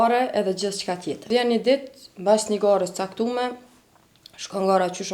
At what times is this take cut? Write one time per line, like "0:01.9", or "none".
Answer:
0:01.3